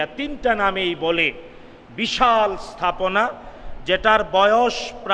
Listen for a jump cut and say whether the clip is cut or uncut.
uncut